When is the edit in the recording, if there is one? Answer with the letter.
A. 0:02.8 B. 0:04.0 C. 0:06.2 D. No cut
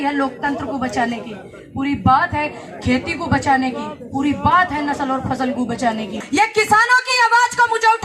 C